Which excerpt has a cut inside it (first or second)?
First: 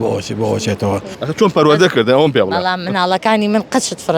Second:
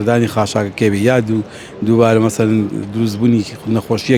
first